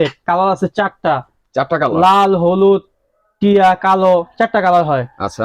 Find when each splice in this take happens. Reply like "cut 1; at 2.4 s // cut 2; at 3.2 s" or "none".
none

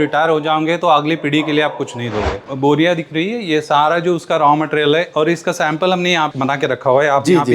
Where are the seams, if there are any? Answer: cut 1; at 2.4 s

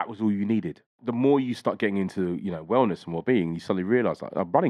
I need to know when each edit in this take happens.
cut 1; at 1.0 s

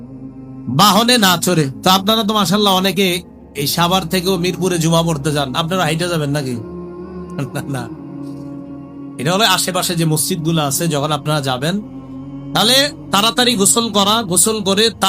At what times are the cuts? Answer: cut 1; at 7.8 s // cut 2; at 8.9 s

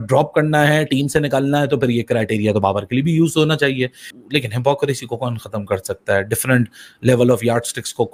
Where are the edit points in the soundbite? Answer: none

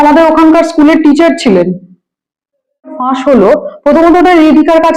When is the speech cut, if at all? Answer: cut 1; at 3.0 s

